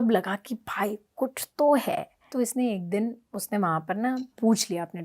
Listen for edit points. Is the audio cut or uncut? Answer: cut